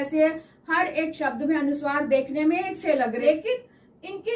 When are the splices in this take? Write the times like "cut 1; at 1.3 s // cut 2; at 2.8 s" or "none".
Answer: cut 1; at 3.2 s